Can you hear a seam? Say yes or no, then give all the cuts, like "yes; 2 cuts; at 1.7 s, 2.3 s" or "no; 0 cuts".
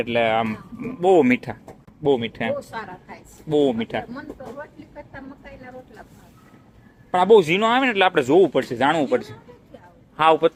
no; 0 cuts